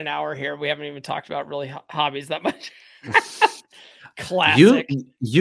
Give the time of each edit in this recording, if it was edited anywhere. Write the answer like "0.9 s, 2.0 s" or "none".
none